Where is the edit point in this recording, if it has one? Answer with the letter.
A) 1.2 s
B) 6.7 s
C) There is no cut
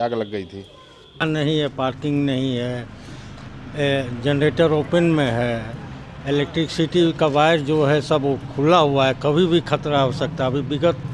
A